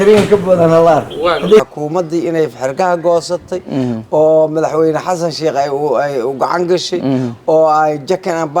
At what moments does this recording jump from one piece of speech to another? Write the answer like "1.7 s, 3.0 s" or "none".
1.6 s